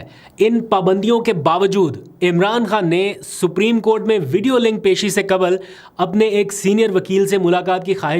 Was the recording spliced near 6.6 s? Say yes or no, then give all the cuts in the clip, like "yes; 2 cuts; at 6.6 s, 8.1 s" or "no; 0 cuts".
no; 0 cuts